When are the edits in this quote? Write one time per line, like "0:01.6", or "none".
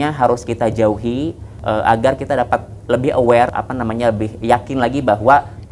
0:01.5
0:03.5